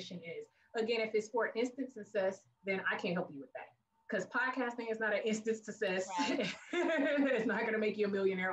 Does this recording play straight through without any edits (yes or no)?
no